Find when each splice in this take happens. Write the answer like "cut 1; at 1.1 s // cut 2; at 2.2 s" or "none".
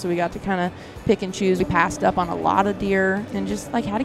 cut 1; at 1.6 s // cut 2; at 3.3 s